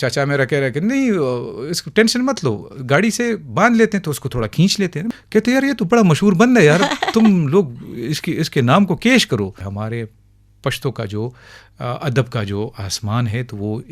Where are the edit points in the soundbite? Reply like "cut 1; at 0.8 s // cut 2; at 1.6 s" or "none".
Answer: cut 1; at 5.1 s // cut 2; at 9.6 s